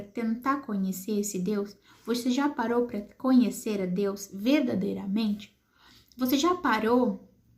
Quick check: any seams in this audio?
no; 0 cuts

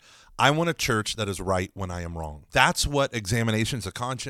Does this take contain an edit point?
yes; 1 cut; at 2.4 s

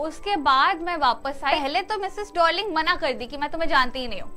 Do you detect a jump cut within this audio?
yes; 1 cut; at 1.5 s

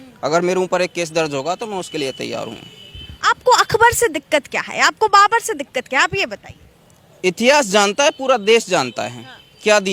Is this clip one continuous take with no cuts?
yes; 0 cuts

